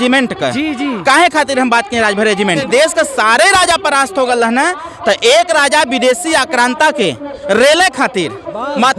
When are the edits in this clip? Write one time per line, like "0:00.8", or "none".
0:02.7